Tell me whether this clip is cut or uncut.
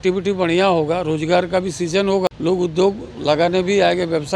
cut